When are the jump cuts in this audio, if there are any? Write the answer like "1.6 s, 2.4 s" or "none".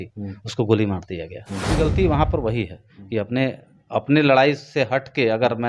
1.7 s